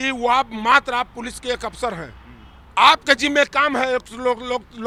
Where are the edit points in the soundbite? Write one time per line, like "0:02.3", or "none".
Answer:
none